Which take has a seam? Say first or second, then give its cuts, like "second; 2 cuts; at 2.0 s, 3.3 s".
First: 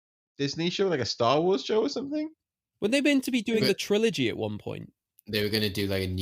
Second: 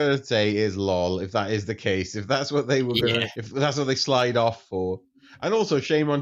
second; 1 cut; at 3.4 s